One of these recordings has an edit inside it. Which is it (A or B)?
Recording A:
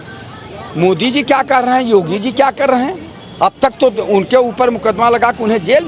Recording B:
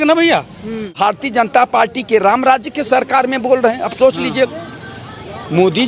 B